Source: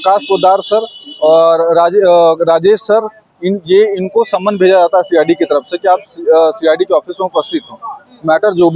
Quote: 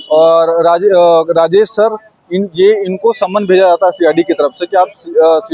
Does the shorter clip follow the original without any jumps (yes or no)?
yes